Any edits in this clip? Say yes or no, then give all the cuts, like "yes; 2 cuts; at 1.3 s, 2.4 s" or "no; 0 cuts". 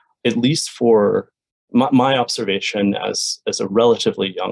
no; 0 cuts